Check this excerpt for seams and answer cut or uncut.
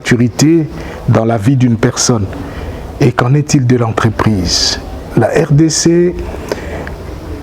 uncut